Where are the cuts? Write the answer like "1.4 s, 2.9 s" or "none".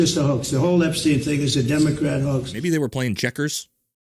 2.5 s